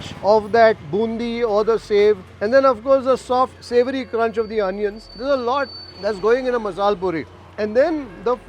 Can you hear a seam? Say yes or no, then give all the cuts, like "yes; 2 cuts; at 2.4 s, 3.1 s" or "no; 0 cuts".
yes; 2 cuts; at 5.1 s, 5.8 s